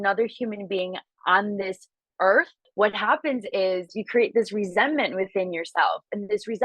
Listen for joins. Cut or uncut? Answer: cut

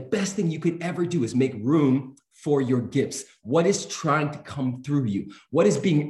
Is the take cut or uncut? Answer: uncut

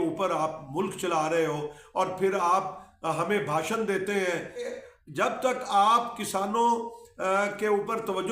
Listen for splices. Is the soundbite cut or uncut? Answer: cut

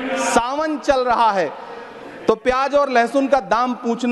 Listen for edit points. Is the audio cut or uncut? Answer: uncut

